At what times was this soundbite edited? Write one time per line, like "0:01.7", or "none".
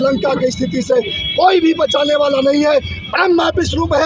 none

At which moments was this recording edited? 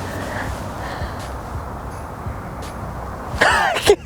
none

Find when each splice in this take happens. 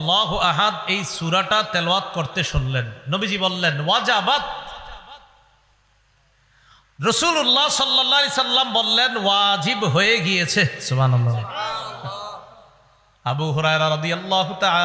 none

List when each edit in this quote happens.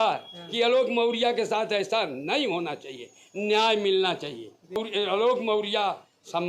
0:04.8

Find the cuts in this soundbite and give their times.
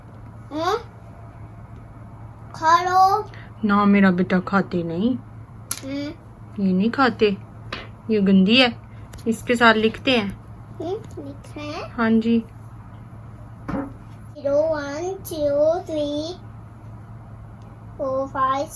0:14.4

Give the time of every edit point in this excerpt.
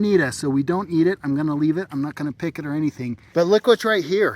0:03.1

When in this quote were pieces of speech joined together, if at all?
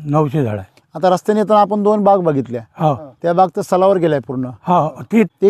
none

